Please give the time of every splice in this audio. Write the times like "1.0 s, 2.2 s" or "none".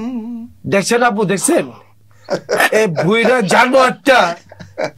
none